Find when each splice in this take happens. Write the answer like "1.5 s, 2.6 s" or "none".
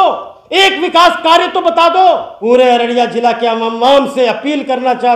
2.3 s